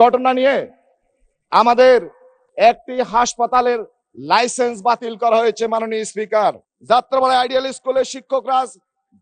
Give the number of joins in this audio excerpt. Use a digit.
1